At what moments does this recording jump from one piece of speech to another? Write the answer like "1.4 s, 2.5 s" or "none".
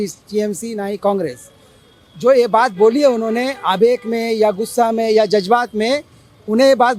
none